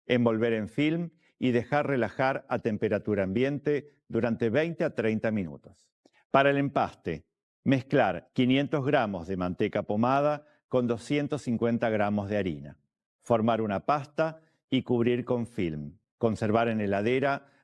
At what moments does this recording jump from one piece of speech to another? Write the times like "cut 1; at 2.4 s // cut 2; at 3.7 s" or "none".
none